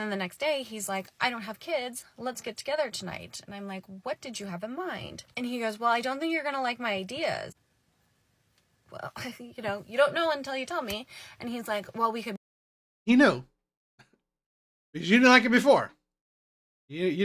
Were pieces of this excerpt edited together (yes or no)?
no